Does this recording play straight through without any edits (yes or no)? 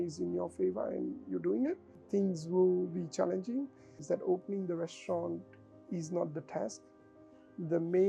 no